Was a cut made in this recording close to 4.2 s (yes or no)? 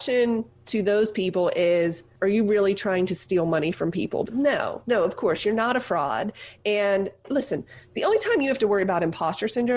yes